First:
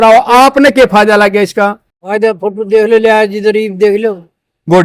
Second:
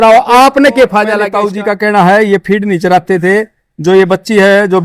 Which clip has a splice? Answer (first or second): second